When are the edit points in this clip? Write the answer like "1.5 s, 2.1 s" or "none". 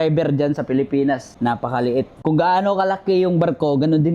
1.3 s, 2.1 s

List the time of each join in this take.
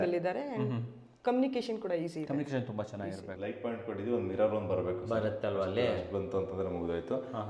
3.3 s

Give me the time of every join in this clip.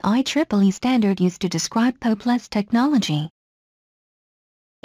1.1 s

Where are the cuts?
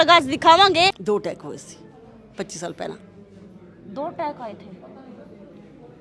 1.0 s

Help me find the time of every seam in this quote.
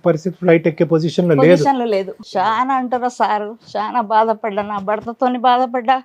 2.2 s

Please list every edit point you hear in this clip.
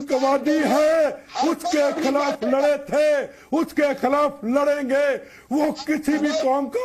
none

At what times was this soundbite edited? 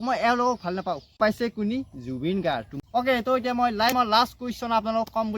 1.1 s, 2.8 s, 3.9 s

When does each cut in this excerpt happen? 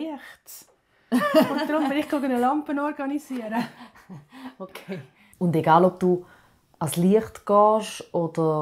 5.2 s

